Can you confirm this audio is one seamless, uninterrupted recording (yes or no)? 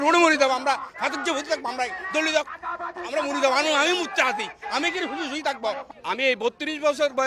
no